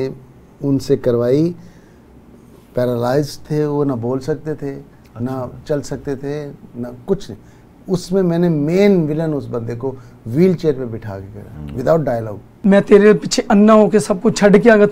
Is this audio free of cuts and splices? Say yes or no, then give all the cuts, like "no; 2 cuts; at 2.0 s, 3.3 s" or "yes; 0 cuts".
no; 1 cut; at 12.5 s